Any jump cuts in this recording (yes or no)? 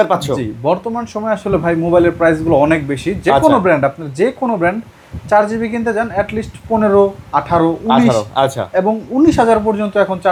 no